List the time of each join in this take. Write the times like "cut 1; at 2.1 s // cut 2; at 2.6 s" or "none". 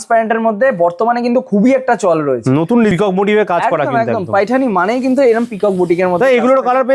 cut 1; at 2.9 s